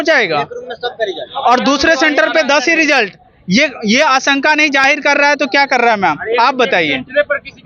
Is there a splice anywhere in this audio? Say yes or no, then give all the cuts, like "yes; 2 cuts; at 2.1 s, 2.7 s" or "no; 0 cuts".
no; 0 cuts